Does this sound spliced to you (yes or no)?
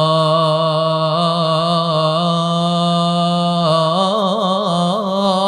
no